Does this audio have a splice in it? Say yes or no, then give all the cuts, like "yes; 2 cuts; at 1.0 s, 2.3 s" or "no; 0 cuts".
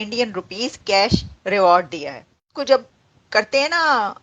yes; 1 cut; at 2.5 s